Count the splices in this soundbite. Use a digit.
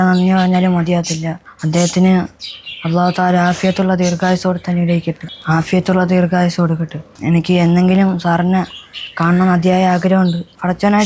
0